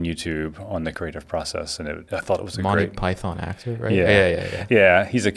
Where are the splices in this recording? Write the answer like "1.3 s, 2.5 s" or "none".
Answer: 1.0 s, 2.0 s